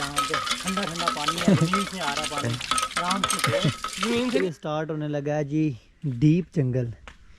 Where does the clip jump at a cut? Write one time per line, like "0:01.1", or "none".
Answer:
0:04.4